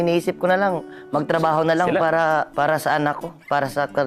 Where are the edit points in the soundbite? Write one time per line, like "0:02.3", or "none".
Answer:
0:02.5